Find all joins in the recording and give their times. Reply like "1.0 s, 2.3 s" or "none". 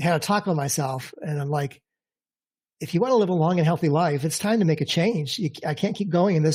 none